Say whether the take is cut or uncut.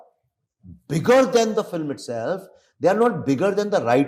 uncut